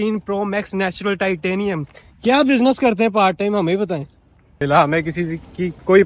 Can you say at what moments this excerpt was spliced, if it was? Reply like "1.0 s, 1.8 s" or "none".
4.6 s